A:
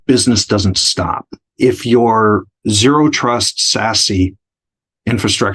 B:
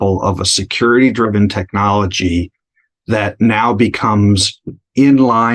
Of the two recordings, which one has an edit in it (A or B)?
A